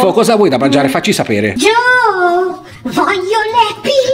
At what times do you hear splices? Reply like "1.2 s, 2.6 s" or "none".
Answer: none